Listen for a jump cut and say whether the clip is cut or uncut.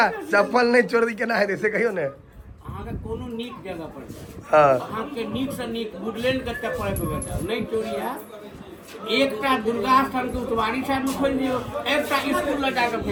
uncut